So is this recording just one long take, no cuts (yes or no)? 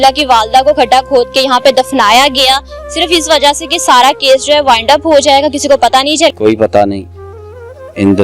no